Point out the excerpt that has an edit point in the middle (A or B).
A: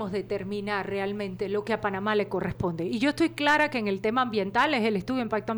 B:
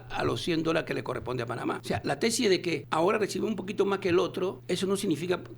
B